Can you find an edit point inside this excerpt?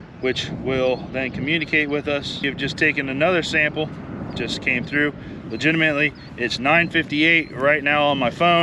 yes; 1 cut; at 2.4 s

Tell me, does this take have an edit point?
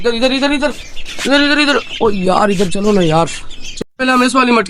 yes; 1 cut; at 3.7 s

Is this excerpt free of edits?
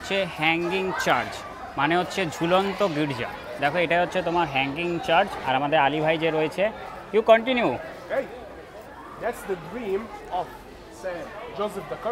yes; 0 cuts

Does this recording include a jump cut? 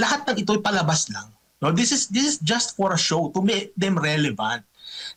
no; 0 cuts

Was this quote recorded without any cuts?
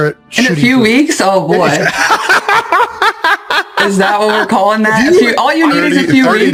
yes; 0 cuts

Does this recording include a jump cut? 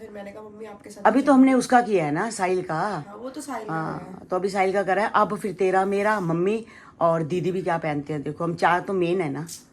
no; 0 cuts

